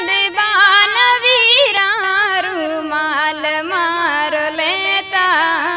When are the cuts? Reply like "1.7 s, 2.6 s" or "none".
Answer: none